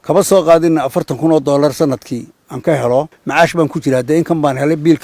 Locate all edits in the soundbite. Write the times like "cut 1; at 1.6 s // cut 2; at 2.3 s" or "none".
cut 1; at 3.2 s

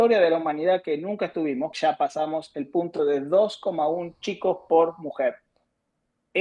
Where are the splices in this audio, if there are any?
cut 1; at 1.7 s

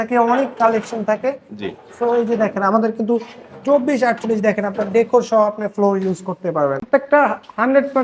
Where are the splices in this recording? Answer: cut 1; at 6.8 s

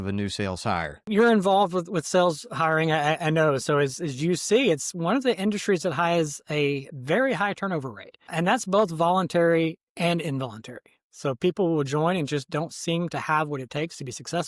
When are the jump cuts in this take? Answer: cut 1; at 1.1 s

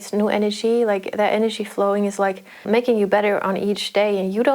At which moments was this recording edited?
cut 1; at 2.6 s

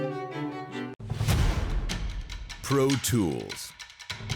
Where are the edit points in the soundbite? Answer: cut 1; at 1.0 s

